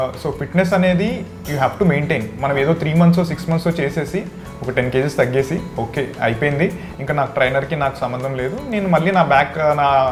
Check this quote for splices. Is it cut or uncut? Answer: uncut